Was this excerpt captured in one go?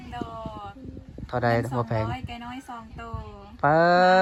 yes; 0 cuts

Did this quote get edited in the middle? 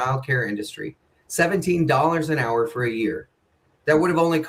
no; 0 cuts

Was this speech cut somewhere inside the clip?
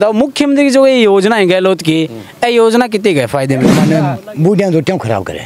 yes; 1 cut; at 3.7 s

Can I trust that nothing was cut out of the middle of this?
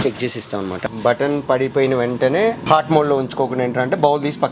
no; 2 cuts; at 0.8 s, 2.6 s

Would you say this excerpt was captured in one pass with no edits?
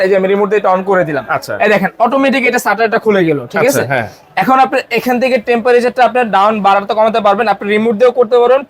yes; 0 cuts

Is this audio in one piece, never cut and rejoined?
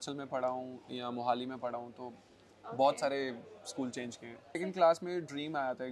no; 1 cut; at 4.6 s

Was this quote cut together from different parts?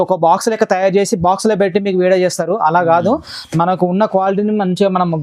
no; 0 cuts

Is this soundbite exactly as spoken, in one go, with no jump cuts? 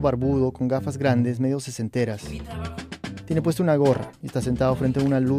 yes; 0 cuts

